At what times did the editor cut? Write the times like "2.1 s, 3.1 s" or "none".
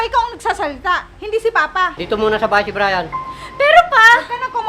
2.0 s